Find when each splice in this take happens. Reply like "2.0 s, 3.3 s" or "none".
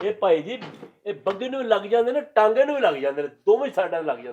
none